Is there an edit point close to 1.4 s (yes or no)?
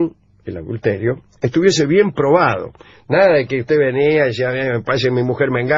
no